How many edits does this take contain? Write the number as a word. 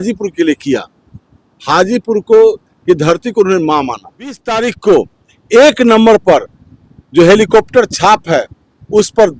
one